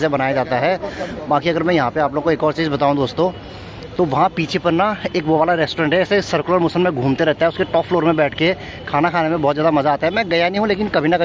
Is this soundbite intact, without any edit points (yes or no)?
yes